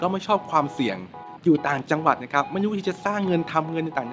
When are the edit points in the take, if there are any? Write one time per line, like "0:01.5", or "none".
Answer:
none